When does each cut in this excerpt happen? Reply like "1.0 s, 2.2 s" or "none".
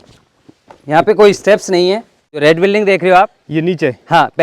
2.4 s